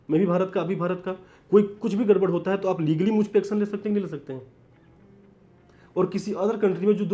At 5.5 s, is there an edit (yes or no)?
no